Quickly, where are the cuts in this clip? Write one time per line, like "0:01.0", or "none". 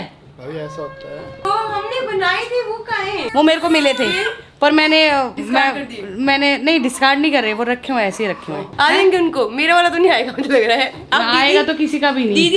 none